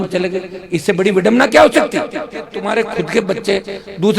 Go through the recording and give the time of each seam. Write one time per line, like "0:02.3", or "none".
0:02.6